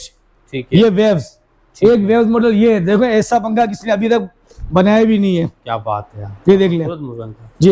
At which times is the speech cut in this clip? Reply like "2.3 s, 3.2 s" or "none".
none